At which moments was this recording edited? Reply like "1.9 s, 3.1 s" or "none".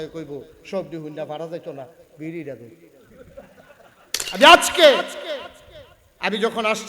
4.2 s